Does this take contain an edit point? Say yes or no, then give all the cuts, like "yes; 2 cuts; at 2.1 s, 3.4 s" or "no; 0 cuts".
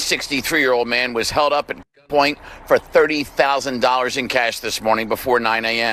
no; 0 cuts